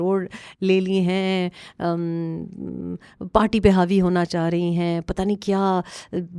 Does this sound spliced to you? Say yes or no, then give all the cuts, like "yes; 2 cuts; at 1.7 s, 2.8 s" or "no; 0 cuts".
no; 0 cuts